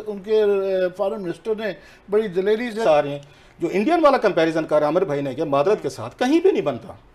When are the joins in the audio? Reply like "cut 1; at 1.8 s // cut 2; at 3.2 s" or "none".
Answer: cut 1; at 2.8 s